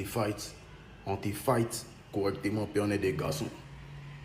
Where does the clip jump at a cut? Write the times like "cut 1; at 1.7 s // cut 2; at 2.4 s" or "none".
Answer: cut 1; at 3.2 s